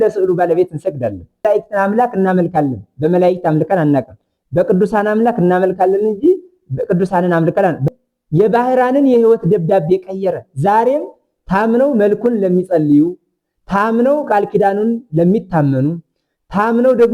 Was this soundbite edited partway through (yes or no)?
yes